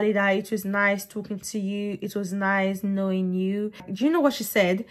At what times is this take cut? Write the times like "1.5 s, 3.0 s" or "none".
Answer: 3.9 s